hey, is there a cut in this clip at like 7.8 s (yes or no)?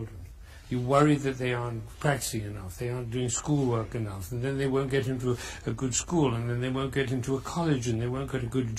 no